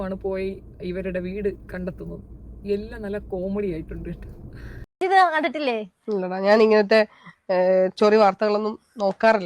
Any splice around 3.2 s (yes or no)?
no